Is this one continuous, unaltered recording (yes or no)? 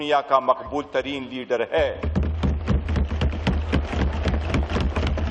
yes